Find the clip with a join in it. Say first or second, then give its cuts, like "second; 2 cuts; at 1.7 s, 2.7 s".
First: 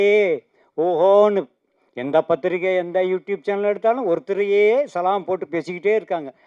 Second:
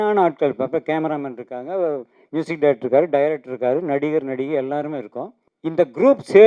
second; 1 cut; at 5.4 s